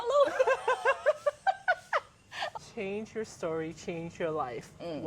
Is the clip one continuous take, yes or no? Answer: no